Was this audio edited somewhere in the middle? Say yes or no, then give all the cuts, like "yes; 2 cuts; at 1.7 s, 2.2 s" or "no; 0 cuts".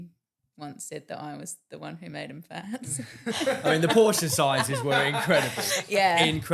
no; 0 cuts